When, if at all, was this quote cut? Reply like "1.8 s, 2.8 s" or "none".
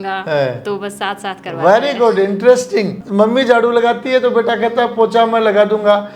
3.0 s